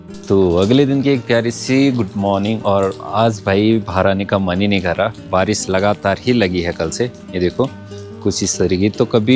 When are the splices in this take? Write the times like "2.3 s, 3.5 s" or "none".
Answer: none